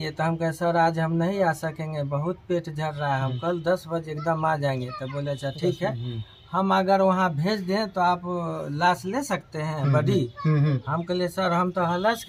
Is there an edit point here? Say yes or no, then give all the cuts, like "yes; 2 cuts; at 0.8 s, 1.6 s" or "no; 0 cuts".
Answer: no; 0 cuts